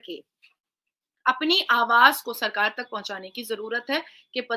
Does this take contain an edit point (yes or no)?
no